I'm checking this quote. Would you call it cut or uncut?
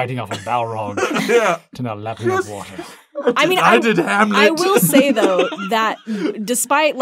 uncut